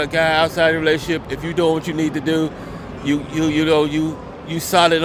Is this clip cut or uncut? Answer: uncut